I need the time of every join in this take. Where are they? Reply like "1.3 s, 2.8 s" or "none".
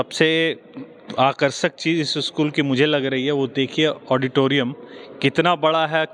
none